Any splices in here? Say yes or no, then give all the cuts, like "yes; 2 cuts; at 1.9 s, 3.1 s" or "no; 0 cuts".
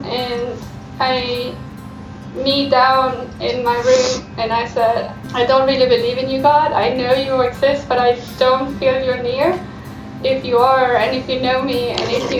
yes; 2 cuts; at 5.2 s, 10.2 s